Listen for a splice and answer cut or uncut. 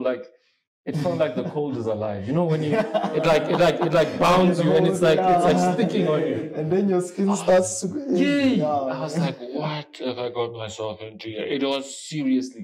uncut